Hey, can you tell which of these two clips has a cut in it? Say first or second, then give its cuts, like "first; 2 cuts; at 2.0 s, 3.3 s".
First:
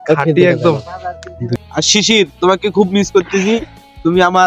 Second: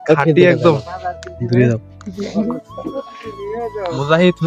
first; 1 cut; at 1.5 s